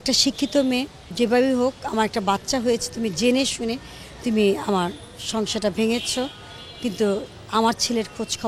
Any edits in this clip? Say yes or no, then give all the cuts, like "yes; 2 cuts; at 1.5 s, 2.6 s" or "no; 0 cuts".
yes; 1 cut; at 1.0 s